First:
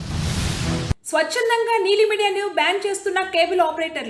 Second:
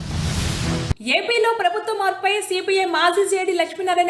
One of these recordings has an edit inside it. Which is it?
second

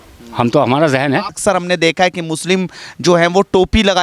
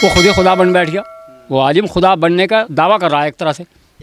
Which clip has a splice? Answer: first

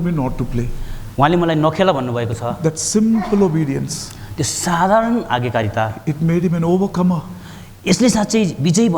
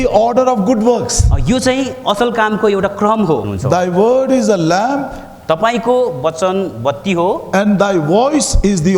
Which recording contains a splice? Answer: second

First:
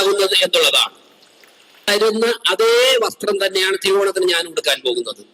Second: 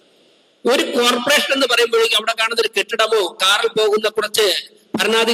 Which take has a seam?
first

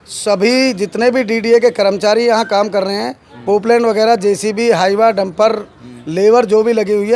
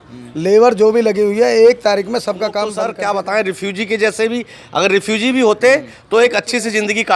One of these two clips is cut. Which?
second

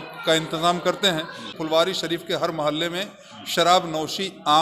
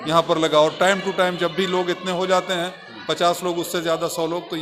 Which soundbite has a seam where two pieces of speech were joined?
first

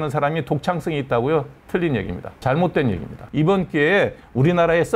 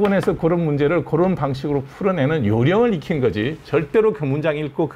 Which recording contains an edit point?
first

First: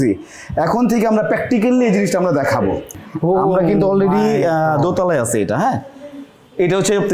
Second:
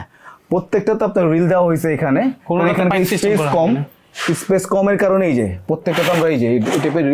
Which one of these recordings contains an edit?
first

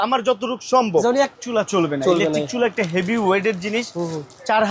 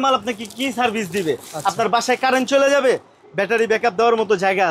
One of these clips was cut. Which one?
first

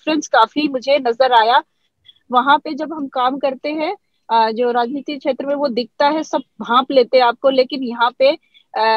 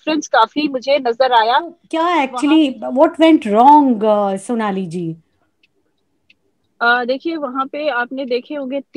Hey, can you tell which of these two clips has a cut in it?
second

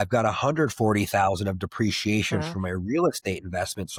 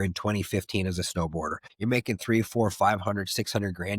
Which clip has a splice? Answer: second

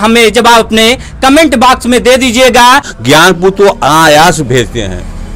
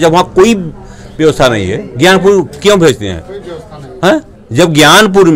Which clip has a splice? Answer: first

